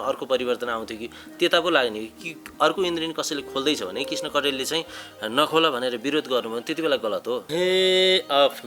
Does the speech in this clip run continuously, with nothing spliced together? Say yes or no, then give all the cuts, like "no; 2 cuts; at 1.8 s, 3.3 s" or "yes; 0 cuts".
no; 1 cut; at 7.4 s